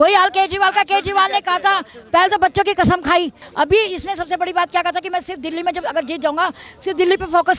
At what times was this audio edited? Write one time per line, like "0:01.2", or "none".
0:03.4

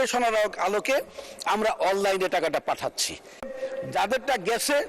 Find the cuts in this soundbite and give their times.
0:03.5

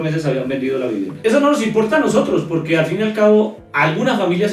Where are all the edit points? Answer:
0:01.1

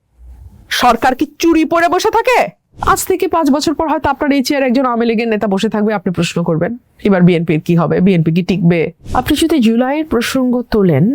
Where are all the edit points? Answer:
0:02.7
0:09.0

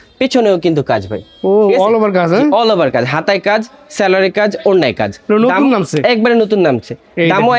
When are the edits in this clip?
none

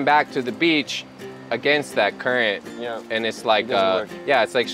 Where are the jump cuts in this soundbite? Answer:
none

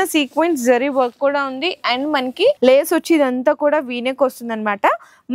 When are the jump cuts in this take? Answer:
0:02.6

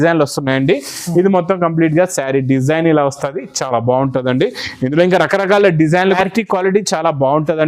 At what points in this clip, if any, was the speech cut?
0:06.2

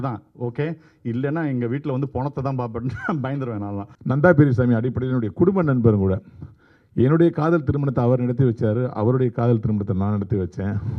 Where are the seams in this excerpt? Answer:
0:03.9

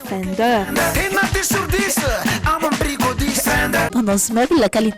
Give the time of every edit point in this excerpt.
0:03.9

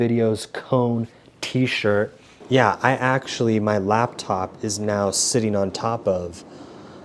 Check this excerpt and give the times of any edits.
0:02.3

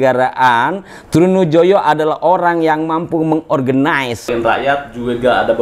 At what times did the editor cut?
0:04.3

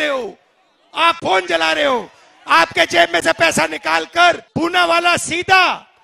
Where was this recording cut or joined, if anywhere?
0:04.4

